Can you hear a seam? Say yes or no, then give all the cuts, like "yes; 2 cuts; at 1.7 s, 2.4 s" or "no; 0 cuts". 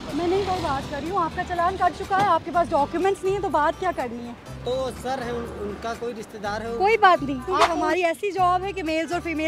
yes; 1 cut; at 7.7 s